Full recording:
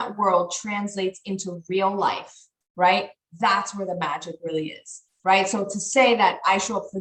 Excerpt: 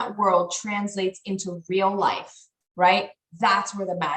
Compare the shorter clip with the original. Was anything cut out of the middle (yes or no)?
no